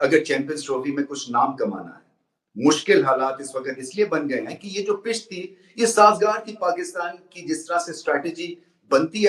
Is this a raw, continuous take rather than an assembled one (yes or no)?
yes